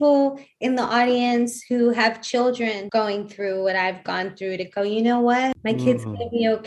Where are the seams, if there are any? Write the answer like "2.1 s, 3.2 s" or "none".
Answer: 2.8 s, 5.6 s